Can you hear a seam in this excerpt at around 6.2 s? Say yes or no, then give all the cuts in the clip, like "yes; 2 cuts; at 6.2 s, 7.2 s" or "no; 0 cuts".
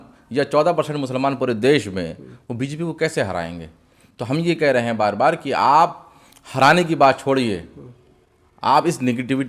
no; 0 cuts